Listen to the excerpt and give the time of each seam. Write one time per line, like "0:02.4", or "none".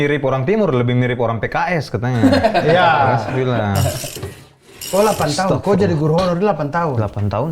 0:04.3

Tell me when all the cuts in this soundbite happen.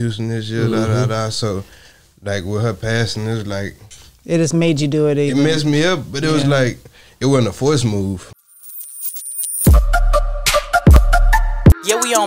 0:08.6

